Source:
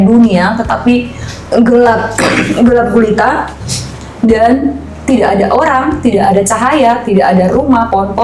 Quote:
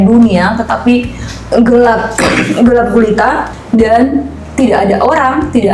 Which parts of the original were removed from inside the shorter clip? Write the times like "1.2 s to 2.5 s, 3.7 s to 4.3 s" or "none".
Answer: 3.5 s to 4.0 s

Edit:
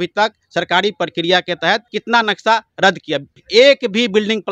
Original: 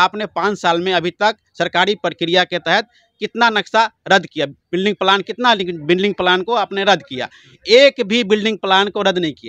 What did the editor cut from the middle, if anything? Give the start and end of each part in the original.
3.0 s to 3.2 s, 4.6 s to 7.5 s

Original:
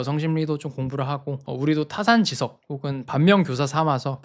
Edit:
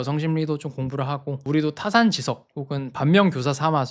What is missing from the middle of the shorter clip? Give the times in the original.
1.4 s to 1.5 s

